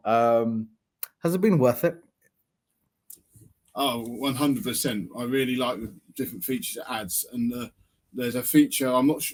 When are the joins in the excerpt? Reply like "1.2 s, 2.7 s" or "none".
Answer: none